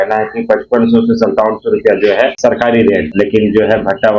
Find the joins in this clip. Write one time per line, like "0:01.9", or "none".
0:02.3
0:03.1

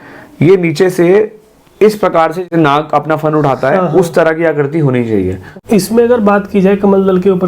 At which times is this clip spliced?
0:02.5
0:05.5

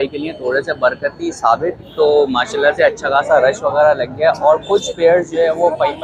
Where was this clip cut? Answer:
none

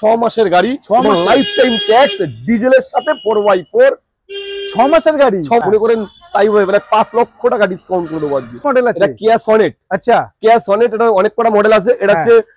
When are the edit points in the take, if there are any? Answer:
0:05.6
0:08.6

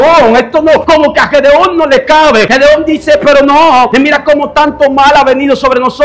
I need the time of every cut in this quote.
0:00.8
0:02.5
0:03.9

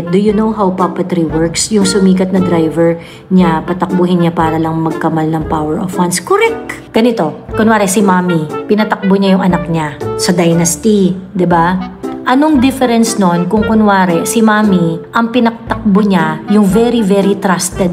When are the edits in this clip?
0:06.8
0:10.0

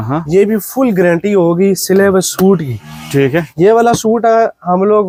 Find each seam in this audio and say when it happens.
none

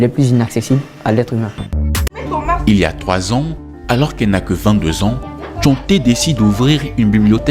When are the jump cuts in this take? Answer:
0:01.8

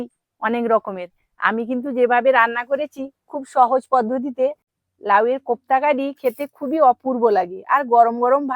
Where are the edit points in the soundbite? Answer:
0:04.7

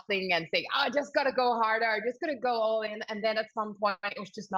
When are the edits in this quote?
none

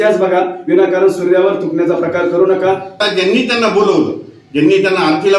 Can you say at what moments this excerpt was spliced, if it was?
0:03.0

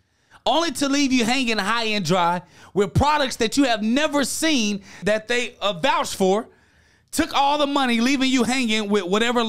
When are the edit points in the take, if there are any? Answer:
0:05.0

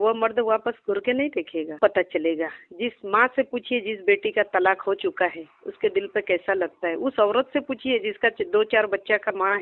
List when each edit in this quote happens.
0:01.8

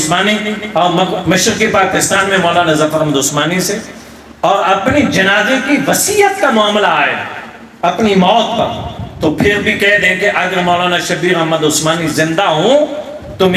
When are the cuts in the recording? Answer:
none

